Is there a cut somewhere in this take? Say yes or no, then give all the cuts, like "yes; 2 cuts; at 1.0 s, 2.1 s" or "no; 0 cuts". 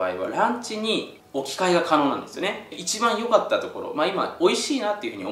yes; 2 cuts; at 1.2 s, 2.6 s